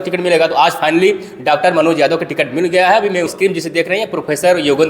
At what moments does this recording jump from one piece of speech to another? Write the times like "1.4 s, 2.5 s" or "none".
3.3 s